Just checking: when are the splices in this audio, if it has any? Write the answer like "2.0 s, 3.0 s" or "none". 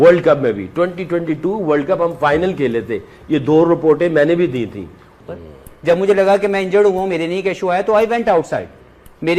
5.0 s